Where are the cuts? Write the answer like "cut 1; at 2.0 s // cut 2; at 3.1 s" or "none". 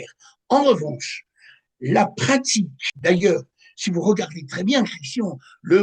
cut 1; at 2.8 s